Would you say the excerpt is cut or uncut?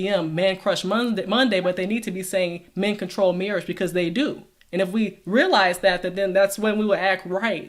uncut